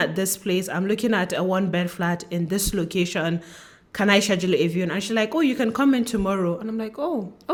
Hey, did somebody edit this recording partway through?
no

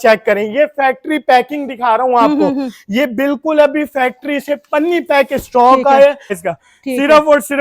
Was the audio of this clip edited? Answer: yes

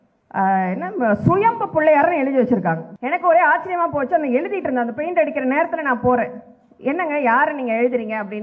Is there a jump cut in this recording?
yes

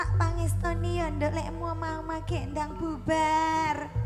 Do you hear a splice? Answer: no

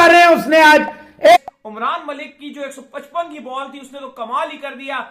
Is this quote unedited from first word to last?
no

